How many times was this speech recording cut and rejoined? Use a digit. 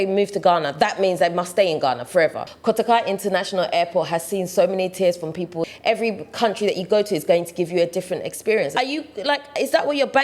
3